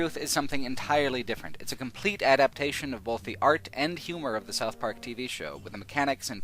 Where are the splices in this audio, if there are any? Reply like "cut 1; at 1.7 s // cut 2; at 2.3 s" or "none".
cut 1; at 1.2 s